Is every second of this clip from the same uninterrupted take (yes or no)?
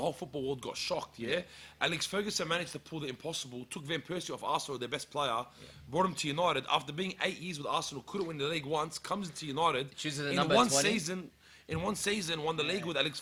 yes